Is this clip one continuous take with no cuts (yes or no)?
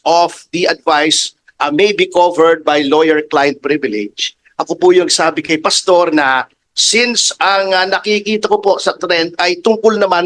yes